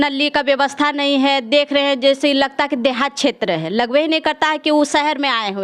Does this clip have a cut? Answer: no; 0 cuts

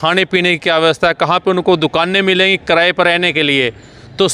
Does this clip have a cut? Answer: no; 0 cuts

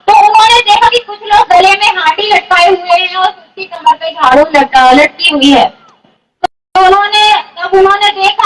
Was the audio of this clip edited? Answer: no; 0 cuts

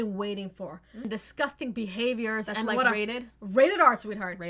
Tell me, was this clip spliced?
yes; 1 cut; at 1.1 s

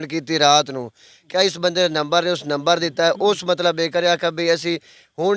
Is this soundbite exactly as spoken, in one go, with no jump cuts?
yes; 0 cuts

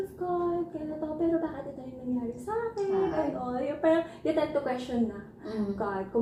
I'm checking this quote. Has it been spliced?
no; 0 cuts

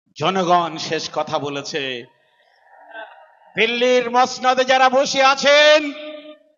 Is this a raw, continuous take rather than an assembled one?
yes; 0 cuts

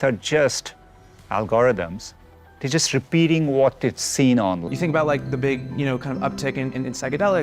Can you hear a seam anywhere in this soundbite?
yes; 1 cut; at 4.6 s

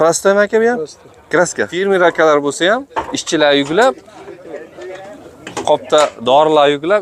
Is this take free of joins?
no; 1 cut; at 1.7 s

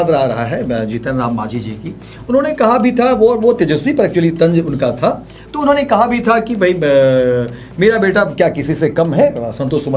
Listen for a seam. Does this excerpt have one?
no; 0 cuts

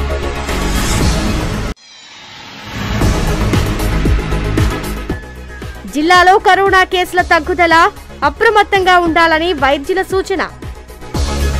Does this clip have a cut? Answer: yes; 2 cuts; at 1.5 s, 4.2 s

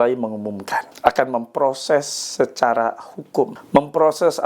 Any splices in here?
yes; 2 cuts; at 0.9 s, 3.6 s

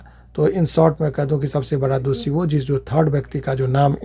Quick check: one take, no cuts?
yes; 0 cuts

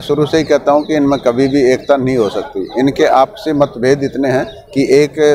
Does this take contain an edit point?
no; 0 cuts

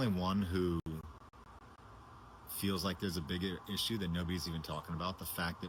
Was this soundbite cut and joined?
no; 0 cuts

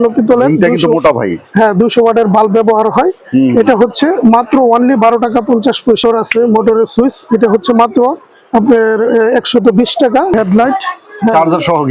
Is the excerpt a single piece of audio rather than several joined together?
no; 2 cuts; at 6.0 s, 10.3 s

